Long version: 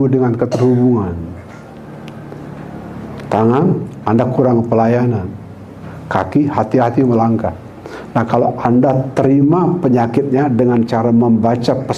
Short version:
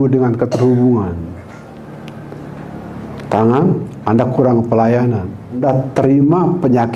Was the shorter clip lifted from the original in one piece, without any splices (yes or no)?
no